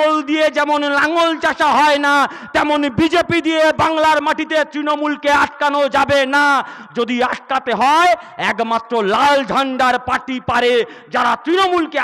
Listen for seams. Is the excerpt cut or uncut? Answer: uncut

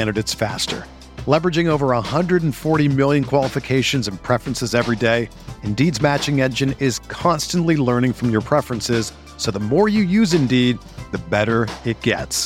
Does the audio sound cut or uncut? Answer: uncut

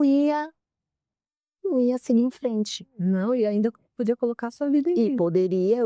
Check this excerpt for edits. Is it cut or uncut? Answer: uncut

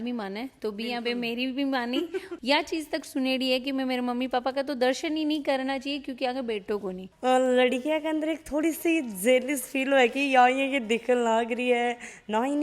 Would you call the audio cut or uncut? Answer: cut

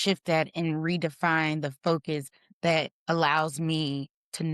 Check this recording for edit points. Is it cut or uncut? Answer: uncut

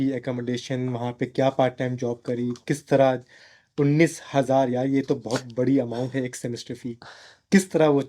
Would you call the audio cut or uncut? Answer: uncut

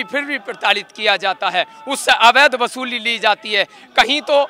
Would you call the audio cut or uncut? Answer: uncut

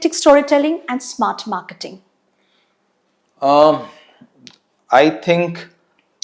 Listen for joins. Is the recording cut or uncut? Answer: uncut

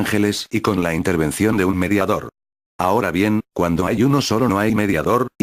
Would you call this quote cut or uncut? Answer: uncut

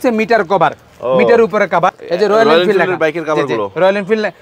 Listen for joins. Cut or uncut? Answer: cut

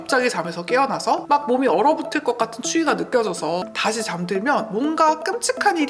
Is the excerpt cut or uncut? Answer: cut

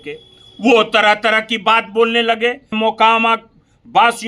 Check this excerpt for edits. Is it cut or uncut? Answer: cut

